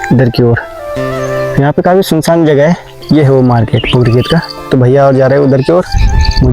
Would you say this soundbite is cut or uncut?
cut